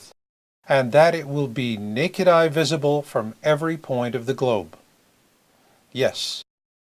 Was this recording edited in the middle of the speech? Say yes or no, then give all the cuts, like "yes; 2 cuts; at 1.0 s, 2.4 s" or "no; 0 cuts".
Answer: no; 0 cuts